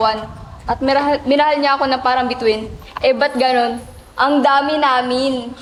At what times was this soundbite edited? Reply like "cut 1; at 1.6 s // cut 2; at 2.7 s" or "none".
none